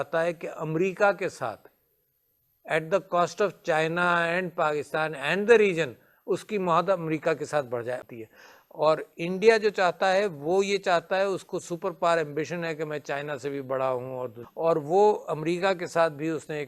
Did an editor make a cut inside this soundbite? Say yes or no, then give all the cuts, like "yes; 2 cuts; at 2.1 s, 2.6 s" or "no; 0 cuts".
yes; 2 cuts; at 8.1 s, 14.4 s